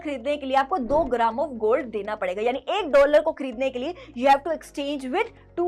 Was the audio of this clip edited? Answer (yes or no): no